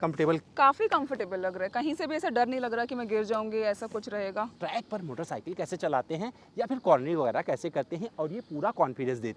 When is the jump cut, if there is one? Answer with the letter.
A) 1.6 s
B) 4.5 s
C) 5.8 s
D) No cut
B